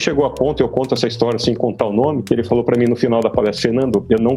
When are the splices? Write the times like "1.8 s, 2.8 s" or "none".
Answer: 2.4 s